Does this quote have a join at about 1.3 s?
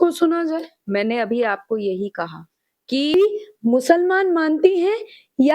no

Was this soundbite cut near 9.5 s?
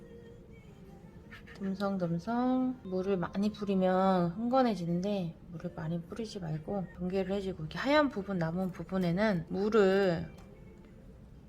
yes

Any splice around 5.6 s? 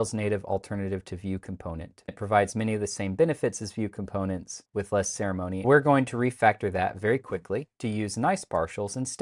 yes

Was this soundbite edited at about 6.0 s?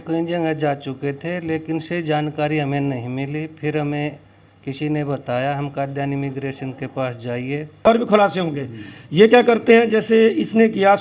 no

